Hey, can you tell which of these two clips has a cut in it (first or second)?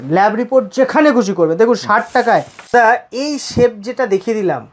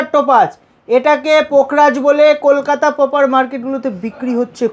first